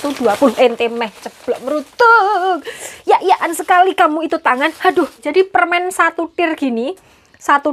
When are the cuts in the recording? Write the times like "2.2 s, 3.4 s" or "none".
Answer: 5.3 s